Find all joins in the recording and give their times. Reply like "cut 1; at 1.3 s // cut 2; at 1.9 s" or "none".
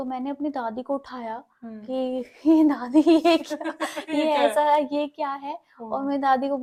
none

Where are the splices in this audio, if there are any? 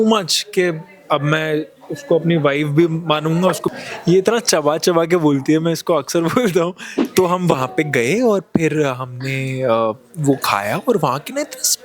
cut 1; at 3.6 s // cut 2; at 6.9 s

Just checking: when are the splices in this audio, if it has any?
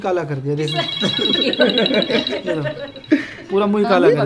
none

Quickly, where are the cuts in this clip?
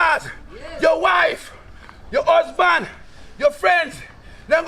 none

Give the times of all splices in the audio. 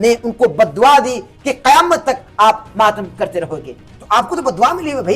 none

